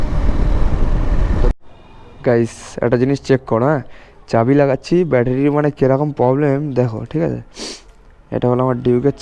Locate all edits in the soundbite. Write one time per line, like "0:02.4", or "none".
0:01.5